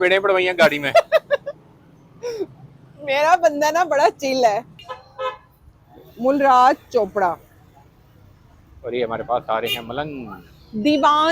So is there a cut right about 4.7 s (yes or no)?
yes